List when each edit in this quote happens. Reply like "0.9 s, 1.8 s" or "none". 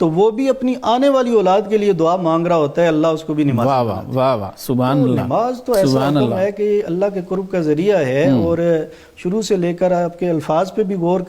none